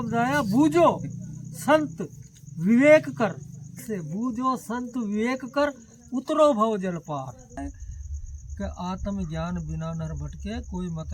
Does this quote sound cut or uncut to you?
cut